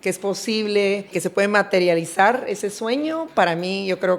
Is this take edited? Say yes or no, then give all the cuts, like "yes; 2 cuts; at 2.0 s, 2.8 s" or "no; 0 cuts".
yes; 1 cut; at 1.1 s